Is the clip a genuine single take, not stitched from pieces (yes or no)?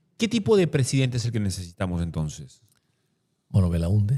yes